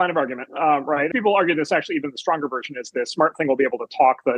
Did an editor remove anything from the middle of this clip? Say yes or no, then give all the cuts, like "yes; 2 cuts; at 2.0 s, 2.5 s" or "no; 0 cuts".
yes; 1 cut; at 1.1 s